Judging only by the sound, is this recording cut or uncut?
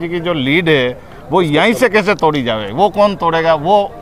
uncut